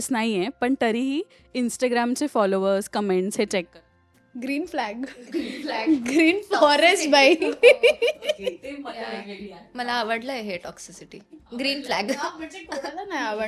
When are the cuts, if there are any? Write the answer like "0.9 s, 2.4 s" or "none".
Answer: none